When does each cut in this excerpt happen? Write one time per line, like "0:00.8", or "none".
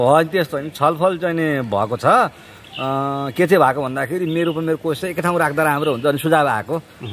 none

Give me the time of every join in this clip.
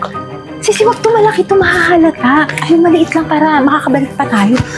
none

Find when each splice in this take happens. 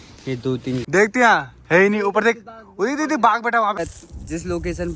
0:00.8
0:03.8

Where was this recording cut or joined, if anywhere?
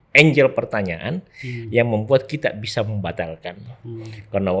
none

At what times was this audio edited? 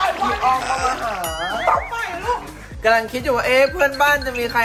0:02.7

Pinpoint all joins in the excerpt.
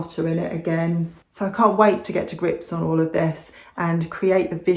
0:01.2

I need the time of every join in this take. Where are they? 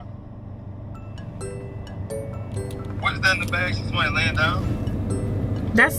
none

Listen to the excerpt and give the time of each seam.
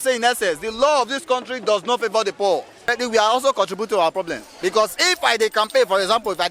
0:02.9

